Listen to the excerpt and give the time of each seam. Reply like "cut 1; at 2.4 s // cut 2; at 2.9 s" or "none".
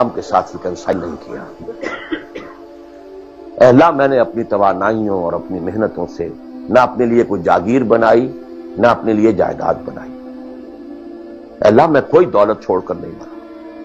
cut 1; at 0.9 s